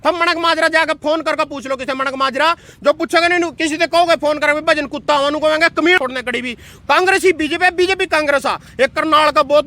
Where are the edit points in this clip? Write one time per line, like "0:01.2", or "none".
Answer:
0:06.0